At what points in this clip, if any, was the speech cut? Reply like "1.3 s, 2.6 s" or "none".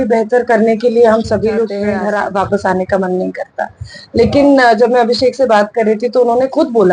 1.8 s